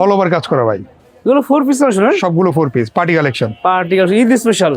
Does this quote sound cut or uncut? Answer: uncut